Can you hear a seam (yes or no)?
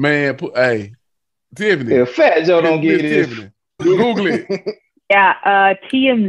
yes